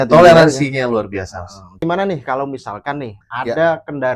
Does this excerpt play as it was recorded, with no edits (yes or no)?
no